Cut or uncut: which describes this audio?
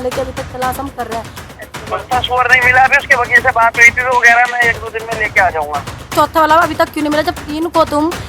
cut